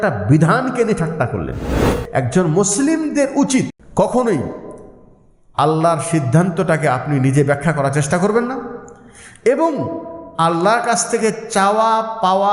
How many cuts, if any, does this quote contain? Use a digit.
2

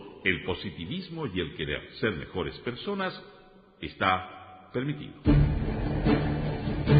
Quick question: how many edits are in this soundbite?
1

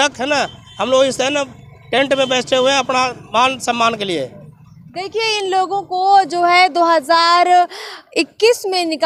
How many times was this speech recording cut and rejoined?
0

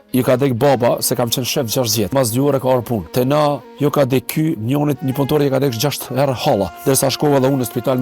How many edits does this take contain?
3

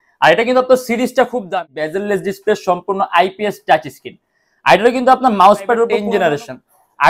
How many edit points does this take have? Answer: 2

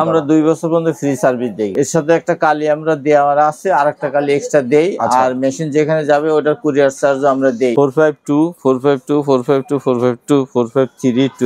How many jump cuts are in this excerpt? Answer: 2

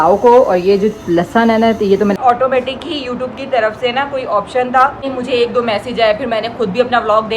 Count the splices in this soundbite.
2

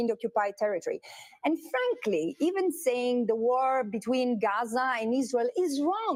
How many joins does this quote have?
0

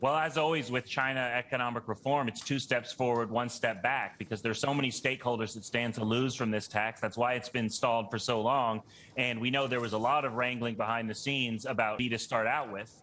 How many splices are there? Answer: 1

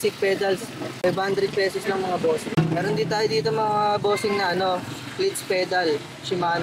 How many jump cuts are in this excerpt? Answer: 0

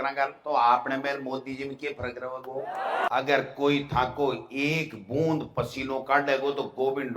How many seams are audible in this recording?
1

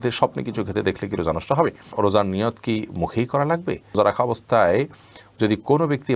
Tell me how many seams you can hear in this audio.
2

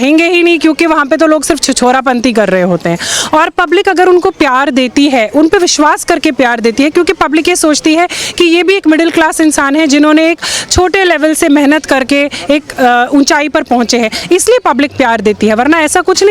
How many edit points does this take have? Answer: 0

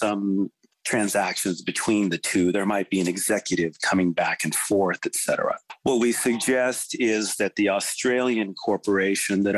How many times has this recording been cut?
1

